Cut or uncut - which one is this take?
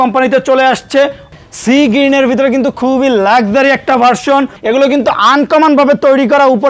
cut